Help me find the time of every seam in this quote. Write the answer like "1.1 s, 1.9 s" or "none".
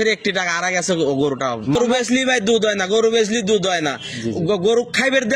1.8 s